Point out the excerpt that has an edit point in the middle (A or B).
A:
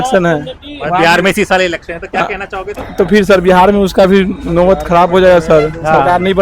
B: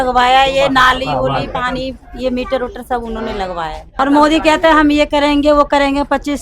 B